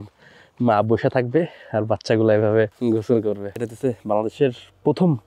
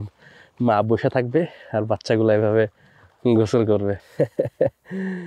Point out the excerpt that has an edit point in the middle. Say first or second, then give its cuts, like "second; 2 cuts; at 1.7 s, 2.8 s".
first; 2 cuts; at 2.8 s, 3.6 s